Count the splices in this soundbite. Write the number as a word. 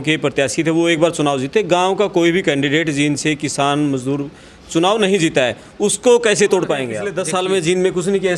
one